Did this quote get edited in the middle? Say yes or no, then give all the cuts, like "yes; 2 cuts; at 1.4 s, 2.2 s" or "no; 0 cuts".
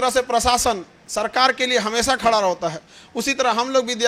no; 0 cuts